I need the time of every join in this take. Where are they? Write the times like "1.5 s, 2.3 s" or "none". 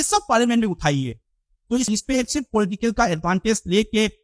1.9 s